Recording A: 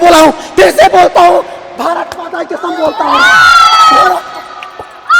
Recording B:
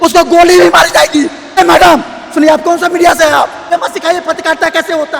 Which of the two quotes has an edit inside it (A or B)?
B